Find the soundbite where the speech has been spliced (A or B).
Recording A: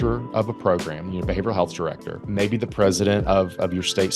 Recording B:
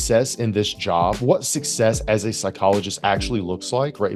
A